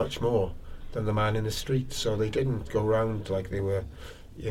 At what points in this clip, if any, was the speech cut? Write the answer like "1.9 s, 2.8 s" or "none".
none